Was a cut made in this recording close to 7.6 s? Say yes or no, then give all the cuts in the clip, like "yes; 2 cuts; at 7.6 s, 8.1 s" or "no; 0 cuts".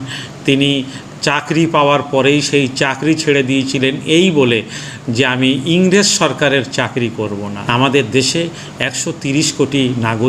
yes; 1 cut; at 7.6 s